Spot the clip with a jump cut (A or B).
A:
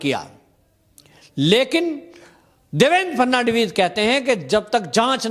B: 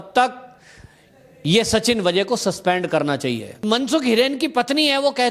B